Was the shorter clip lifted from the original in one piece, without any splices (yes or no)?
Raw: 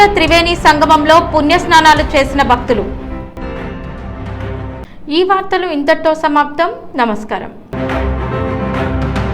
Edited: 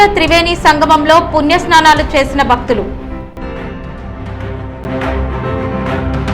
no